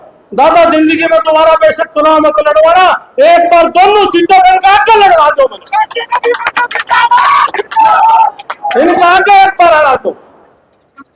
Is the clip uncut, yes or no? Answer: yes